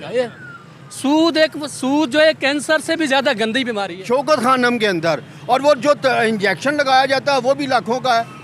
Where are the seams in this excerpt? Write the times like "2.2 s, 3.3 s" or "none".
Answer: 3.9 s